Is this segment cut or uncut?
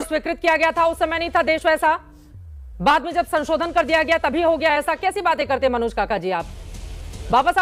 uncut